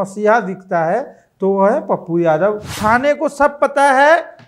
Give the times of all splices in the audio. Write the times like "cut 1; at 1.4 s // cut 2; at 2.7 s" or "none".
cut 1; at 2.8 s

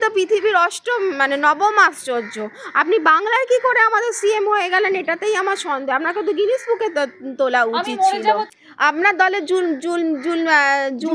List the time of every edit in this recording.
none

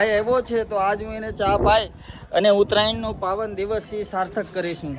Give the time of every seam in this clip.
none

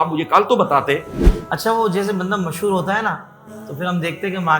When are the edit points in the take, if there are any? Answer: cut 1; at 1.2 s

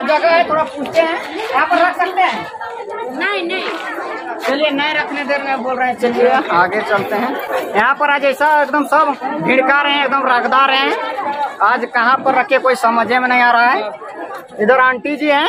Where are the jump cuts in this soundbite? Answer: none

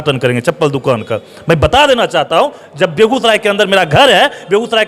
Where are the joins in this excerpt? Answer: none

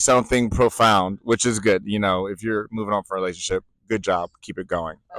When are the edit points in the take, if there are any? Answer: none

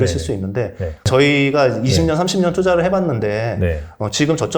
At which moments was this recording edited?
cut 1; at 1.1 s

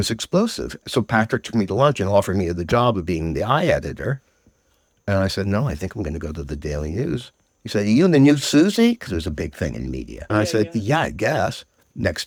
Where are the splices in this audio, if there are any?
none

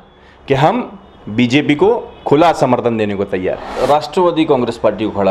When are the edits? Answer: cut 1; at 3.7 s

